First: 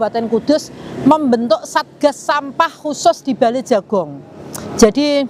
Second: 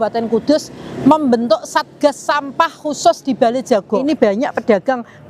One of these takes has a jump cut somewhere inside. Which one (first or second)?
second